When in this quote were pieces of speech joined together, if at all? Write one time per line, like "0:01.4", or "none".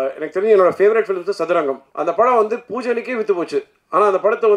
0:01.9